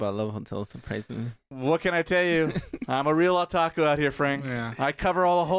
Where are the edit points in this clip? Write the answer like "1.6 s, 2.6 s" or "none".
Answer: none